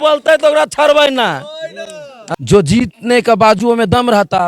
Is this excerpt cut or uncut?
cut